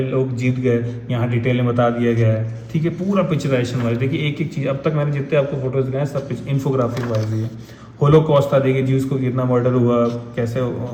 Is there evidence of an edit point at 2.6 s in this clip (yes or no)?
no